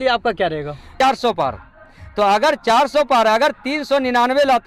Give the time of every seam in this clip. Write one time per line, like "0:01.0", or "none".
0:00.9